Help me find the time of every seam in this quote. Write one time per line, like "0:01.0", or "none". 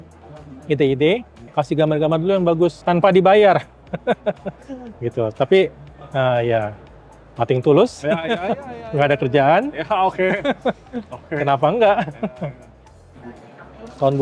none